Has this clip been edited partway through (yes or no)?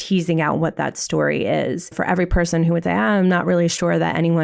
yes